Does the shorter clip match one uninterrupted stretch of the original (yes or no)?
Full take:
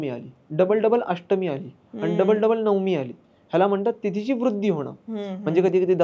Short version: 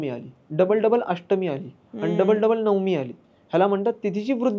yes